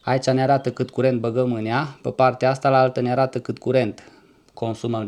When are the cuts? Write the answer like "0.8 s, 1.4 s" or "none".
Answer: none

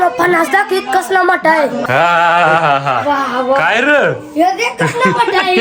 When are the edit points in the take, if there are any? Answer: none

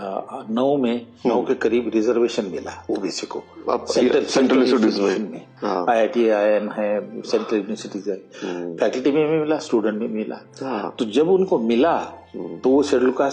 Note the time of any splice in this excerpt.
none

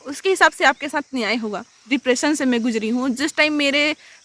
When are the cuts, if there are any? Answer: 1.8 s

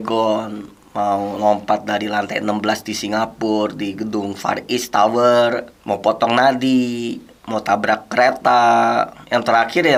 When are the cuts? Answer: none

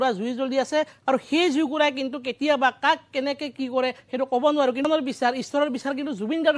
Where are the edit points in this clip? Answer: 4.9 s

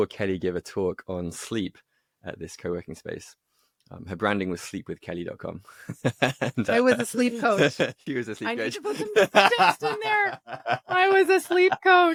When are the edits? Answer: none

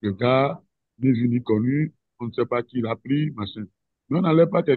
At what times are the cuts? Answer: none

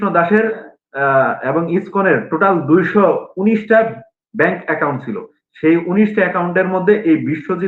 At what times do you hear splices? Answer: none

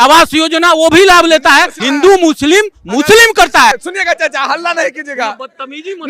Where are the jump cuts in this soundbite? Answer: 1.8 s, 3.8 s

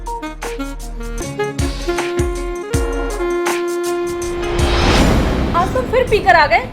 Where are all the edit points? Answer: 1.2 s, 5.0 s

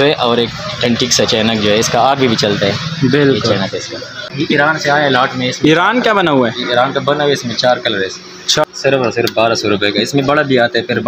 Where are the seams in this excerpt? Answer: 4.2 s, 8.6 s

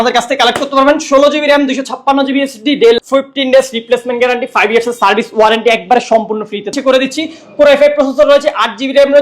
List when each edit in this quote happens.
3.0 s, 6.8 s

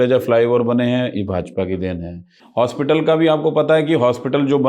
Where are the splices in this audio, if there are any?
2.4 s

